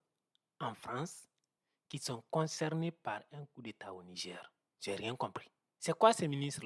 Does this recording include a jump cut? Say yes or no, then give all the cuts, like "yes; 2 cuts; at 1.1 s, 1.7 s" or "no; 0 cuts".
no; 0 cuts